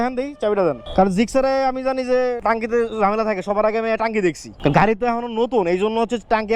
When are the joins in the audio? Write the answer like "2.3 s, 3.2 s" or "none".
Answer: none